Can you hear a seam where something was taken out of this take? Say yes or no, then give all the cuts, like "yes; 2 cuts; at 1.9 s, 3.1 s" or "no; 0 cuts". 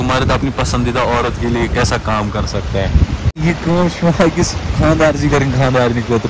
yes; 1 cut; at 3.4 s